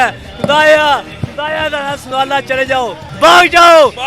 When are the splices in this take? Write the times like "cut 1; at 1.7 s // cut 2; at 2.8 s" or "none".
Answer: cut 1; at 3.0 s